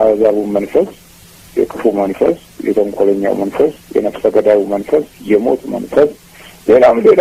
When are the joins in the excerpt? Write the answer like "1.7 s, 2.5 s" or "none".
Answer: none